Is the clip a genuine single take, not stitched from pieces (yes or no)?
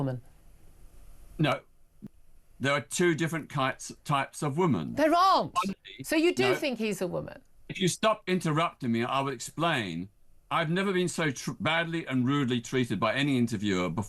no